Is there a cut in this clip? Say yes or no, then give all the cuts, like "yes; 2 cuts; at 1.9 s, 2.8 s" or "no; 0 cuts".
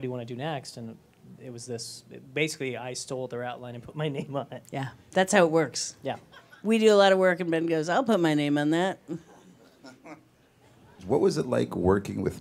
yes; 1 cut; at 4.4 s